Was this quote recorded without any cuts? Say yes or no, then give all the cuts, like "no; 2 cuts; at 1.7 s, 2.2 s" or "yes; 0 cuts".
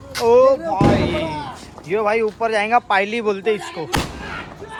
yes; 0 cuts